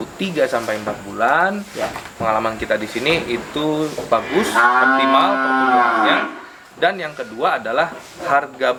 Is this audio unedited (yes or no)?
yes